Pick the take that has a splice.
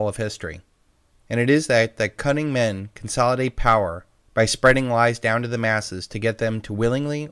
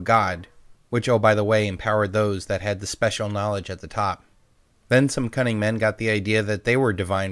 second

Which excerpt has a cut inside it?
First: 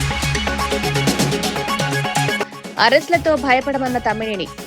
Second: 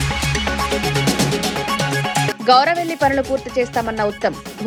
first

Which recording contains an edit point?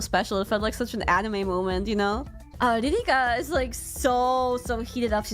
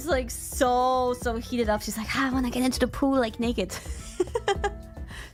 first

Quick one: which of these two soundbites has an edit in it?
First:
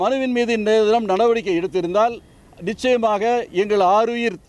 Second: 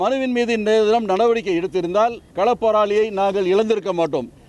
second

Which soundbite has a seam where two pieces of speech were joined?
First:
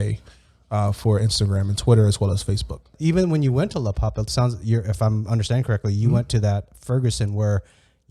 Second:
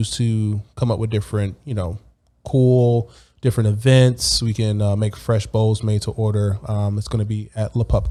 first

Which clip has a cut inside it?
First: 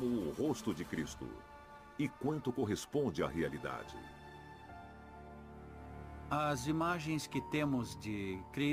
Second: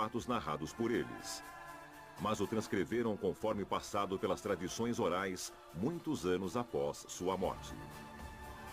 second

